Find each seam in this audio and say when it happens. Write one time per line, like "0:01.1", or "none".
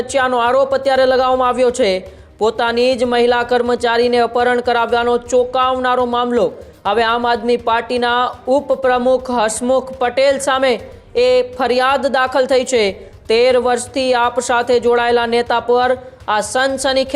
none